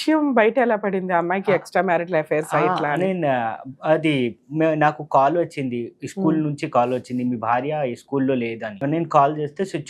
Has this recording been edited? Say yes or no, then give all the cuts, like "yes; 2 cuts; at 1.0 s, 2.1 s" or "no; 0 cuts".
yes; 1 cut; at 8.8 s